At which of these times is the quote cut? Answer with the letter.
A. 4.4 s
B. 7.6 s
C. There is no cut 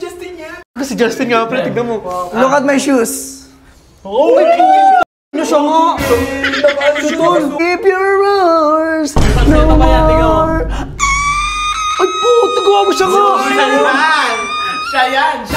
B